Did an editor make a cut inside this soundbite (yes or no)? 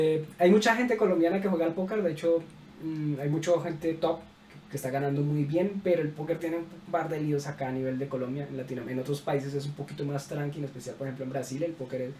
no